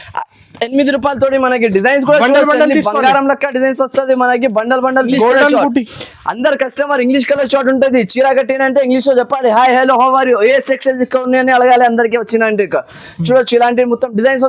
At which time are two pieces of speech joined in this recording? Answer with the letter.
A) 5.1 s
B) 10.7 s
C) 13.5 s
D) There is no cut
A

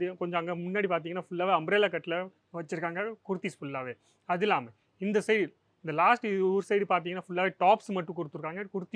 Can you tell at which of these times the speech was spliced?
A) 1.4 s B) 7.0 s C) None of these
C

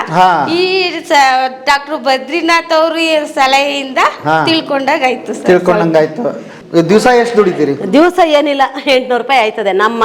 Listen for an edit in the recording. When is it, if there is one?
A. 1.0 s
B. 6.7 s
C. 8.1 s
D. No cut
B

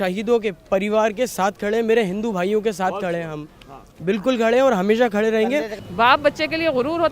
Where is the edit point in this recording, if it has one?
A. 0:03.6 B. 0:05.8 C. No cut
B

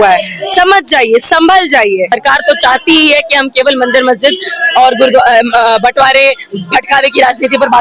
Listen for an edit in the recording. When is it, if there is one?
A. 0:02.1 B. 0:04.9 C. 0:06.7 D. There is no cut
A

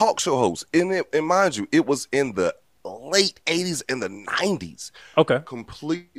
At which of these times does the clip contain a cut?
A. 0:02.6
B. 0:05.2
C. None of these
C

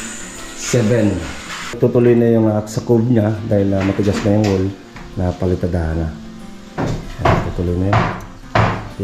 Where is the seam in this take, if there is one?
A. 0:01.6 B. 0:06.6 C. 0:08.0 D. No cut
A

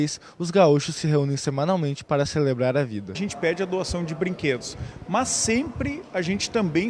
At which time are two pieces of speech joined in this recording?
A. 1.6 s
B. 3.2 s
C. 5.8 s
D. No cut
B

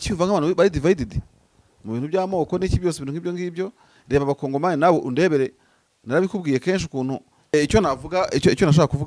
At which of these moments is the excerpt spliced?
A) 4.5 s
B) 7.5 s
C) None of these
B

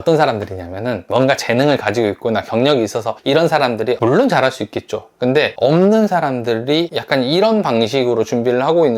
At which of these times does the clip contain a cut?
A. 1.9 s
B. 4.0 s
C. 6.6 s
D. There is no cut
B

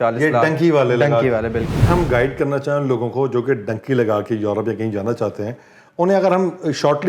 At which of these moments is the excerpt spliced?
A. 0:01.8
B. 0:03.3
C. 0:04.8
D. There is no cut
A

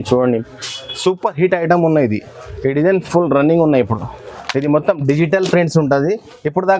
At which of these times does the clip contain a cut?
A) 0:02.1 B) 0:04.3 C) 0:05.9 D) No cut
B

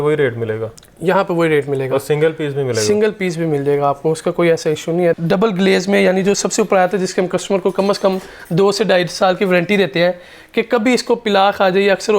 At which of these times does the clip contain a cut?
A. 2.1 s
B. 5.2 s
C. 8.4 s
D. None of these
B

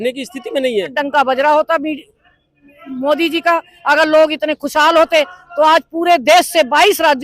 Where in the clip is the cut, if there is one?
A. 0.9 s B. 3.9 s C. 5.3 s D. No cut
A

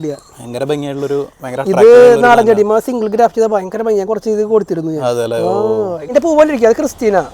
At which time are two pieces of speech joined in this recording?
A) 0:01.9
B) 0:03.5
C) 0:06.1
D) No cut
C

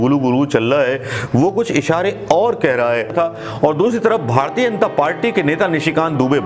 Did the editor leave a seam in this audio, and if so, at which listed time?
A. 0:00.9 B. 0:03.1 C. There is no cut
B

